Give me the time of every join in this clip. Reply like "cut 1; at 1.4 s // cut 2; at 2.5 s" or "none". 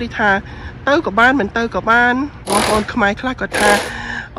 cut 1; at 2.4 s